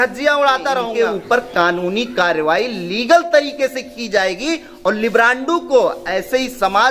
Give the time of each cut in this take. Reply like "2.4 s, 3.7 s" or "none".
0.9 s